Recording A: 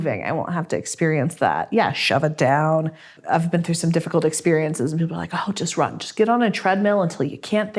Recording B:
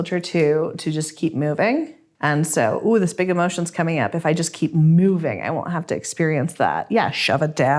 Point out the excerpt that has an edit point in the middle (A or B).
B